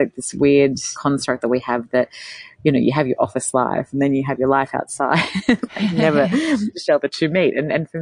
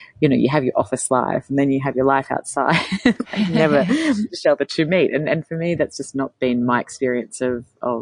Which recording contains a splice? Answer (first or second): first